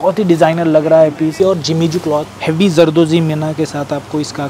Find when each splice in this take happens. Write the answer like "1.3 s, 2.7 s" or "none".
1.3 s, 2.3 s